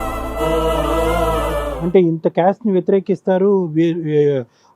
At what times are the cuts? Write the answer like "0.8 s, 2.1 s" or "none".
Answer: 1.7 s